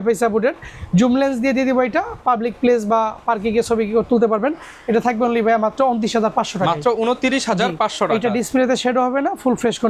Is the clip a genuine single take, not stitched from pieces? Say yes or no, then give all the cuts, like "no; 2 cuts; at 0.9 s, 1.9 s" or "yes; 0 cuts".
yes; 0 cuts